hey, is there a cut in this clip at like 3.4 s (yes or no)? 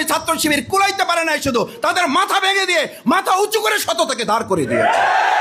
no